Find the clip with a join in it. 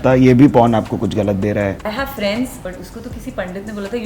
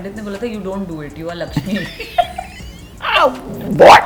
first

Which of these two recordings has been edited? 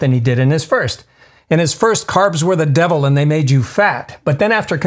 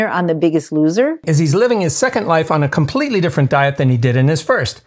second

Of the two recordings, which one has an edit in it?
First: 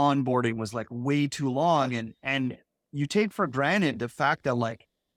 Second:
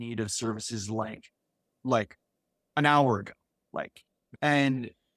second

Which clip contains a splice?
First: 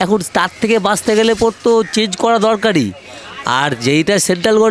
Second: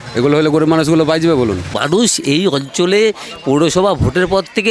second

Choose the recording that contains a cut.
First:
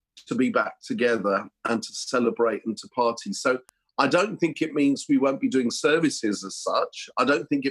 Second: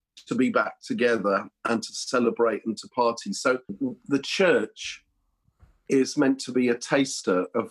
second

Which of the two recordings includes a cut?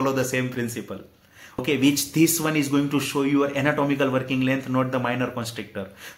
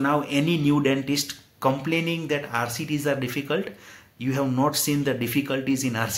first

